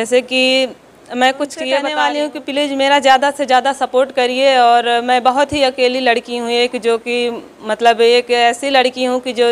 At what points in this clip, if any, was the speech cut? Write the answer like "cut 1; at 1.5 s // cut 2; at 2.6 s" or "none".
cut 1; at 1.9 s